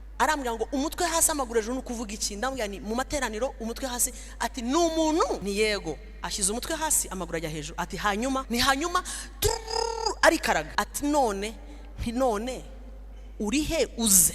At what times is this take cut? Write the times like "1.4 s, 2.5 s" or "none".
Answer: 5.4 s, 8.5 s, 10.7 s

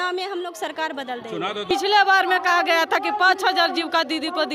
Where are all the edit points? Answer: 1.7 s

